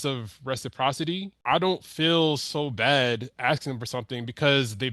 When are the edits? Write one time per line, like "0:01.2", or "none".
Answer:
0:01.3